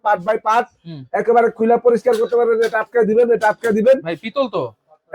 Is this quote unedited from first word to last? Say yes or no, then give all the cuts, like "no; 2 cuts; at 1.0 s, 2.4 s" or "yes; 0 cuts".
yes; 0 cuts